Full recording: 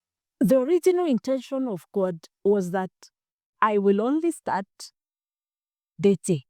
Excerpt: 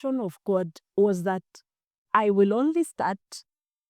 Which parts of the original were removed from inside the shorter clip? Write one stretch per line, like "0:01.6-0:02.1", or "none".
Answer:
none